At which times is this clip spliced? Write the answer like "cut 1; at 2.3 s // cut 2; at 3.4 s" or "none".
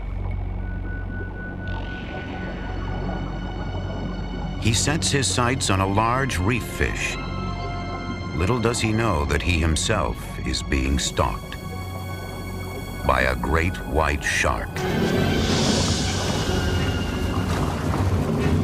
none